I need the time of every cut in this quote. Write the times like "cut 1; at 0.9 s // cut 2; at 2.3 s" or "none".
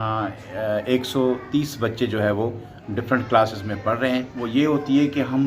cut 1; at 4.4 s